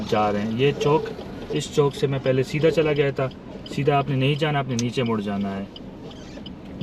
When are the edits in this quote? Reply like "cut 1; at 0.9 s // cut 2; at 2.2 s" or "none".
none